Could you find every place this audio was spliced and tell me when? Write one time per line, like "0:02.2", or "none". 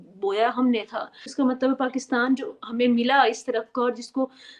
0:01.3